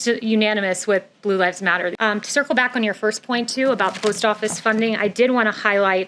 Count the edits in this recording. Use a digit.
1